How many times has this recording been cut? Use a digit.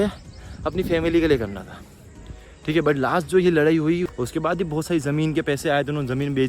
1